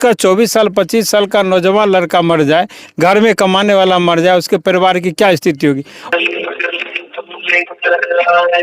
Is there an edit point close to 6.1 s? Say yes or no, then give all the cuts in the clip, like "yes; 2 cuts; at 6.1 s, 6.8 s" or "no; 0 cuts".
yes; 1 cut; at 6.1 s